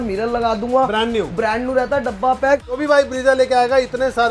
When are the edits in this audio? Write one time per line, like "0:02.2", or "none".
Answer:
0:02.8